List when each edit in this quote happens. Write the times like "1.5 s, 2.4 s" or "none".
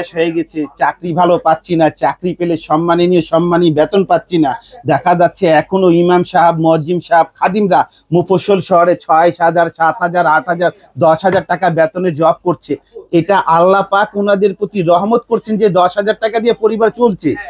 none